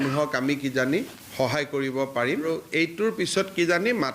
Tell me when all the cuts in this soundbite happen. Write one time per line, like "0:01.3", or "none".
0:01.2
0:02.5